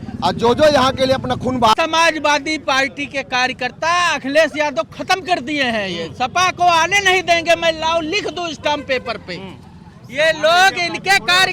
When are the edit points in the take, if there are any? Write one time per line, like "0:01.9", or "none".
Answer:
0:01.7